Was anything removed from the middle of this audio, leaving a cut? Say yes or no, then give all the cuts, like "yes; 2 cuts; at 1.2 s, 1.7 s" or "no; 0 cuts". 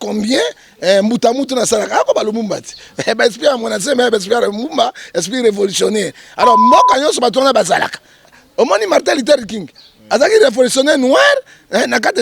yes; 1 cut; at 8.4 s